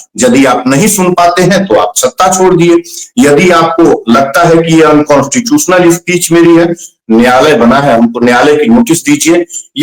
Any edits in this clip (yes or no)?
no